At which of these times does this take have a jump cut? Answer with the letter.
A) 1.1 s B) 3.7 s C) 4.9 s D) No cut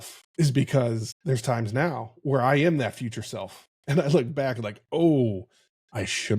A